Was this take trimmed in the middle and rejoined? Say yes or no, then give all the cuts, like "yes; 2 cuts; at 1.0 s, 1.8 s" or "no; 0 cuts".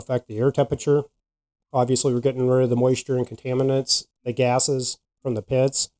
yes; 1 cut; at 4.0 s